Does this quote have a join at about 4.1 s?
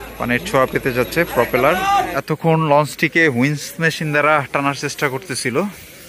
no; 1 cut; at 2.2 s

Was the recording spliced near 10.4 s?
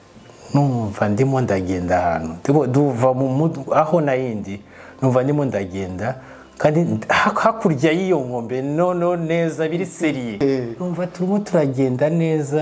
yes; 1 cut; at 10.4 s

